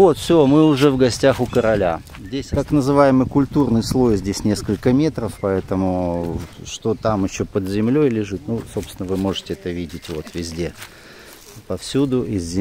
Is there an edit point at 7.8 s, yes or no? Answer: no